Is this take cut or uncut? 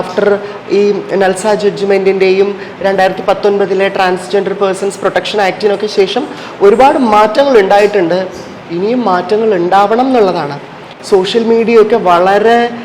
cut